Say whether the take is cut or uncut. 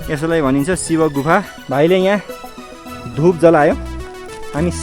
cut